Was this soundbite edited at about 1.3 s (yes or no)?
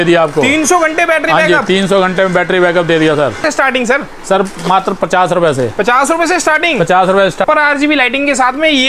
no